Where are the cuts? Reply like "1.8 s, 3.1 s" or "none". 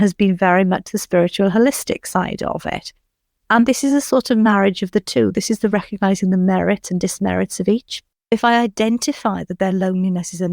8.3 s